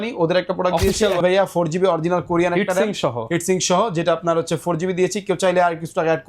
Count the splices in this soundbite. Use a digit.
1